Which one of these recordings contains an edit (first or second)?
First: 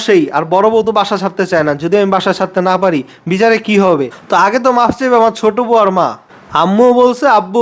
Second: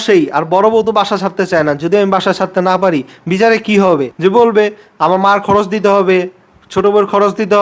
first